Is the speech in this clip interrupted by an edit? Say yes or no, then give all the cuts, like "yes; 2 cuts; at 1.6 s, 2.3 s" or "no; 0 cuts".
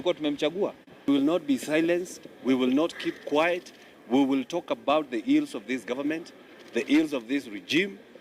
yes; 1 cut; at 1.0 s